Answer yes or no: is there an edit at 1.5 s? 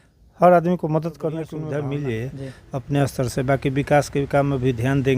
yes